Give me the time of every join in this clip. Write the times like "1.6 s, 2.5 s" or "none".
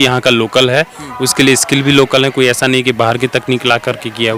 none